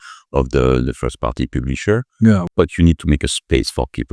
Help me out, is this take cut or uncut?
cut